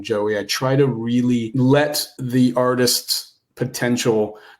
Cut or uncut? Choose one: cut